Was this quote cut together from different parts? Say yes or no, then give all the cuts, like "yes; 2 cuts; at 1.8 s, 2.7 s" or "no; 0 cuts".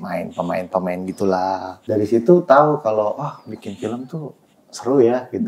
yes; 1 cut; at 1.7 s